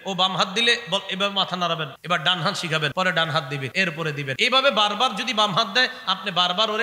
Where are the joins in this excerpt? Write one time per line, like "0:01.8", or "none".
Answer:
0:02.0
0:02.9
0:04.0